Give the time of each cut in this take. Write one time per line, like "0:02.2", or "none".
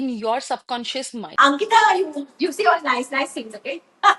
0:01.2